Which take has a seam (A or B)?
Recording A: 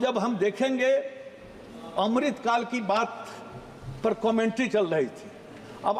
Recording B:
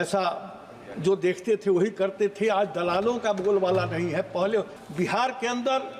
B